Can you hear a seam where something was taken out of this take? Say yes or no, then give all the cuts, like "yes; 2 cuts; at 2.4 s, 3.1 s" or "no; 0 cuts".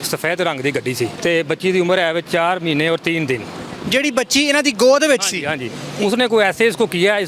yes; 2 cuts; at 1.1 s, 2.3 s